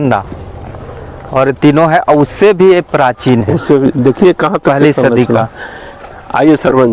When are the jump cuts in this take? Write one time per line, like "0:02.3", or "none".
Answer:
none